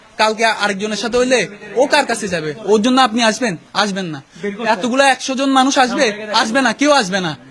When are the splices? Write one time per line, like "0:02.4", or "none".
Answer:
none